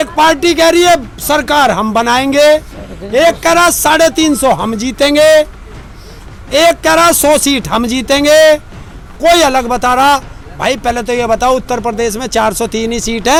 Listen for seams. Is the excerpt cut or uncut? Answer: uncut